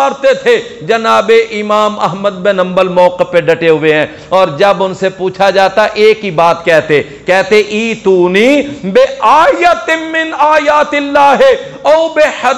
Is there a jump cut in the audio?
no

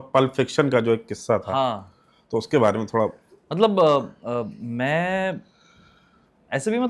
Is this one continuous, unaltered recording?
yes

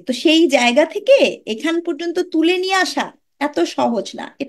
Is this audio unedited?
yes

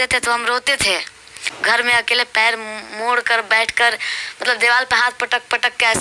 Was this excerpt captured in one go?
no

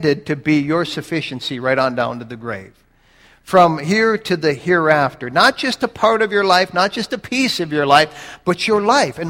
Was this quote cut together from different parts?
no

